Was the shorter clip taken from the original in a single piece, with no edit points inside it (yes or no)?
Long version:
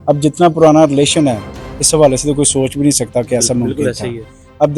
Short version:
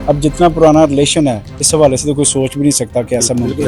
no